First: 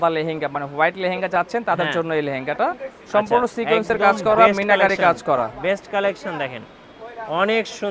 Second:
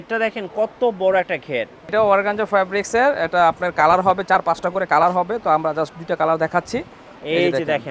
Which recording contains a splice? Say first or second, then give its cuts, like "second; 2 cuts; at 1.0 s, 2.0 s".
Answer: second; 1 cut; at 1.9 s